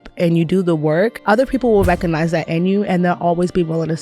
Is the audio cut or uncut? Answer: cut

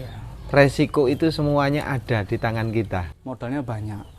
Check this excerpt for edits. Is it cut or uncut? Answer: cut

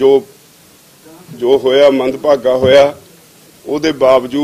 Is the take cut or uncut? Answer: uncut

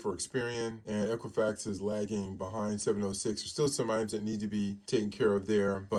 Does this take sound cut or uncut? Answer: uncut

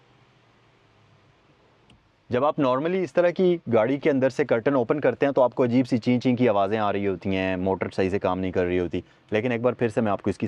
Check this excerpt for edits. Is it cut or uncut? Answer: uncut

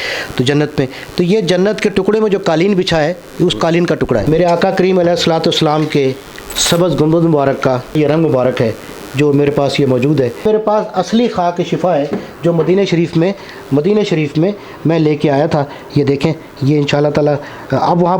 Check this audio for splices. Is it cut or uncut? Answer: cut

